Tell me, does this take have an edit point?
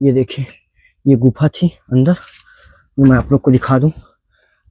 no; 0 cuts

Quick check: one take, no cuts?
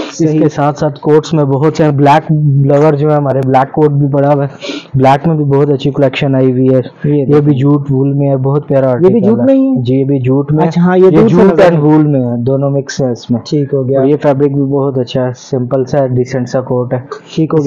yes; 0 cuts

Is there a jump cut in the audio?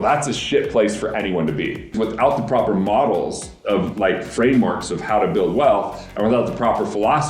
yes; 1 cut; at 1.9 s

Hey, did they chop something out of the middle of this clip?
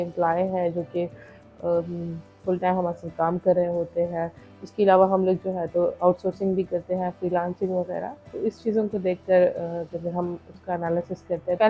no; 0 cuts

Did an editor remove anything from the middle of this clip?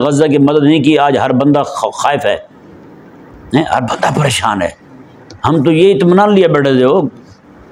no; 0 cuts

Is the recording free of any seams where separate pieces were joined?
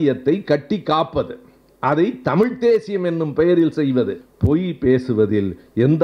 no; 1 cut; at 4.3 s

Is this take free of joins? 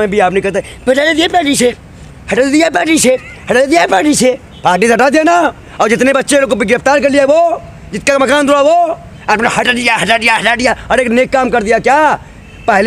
yes; 0 cuts

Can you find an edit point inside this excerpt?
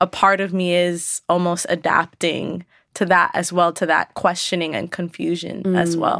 yes; 1 cut; at 4.1 s

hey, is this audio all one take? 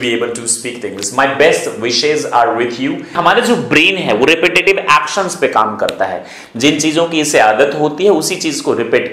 no; 1 cut; at 3.1 s

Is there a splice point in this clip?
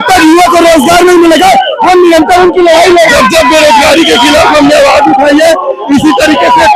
yes; 1 cut; at 3.1 s

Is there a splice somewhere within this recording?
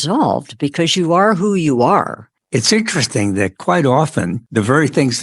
yes; 2 cuts; at 2.3 s, 4.4 s

